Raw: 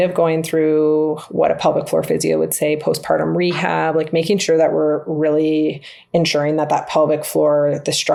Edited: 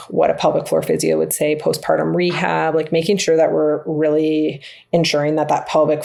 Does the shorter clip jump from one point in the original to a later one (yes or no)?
no